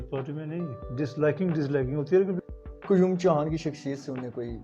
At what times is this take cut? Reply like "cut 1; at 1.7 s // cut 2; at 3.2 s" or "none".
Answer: cut 1; at 2.4 s